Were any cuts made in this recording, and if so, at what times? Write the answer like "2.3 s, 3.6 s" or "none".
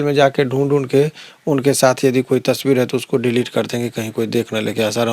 none